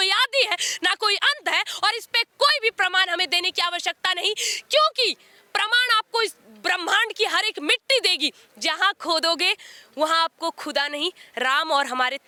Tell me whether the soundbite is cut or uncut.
uncut